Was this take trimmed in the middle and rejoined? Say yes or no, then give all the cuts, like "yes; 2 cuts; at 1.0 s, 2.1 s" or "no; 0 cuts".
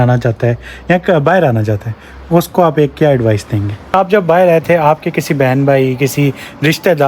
yes; 1 cut; at 3.9 s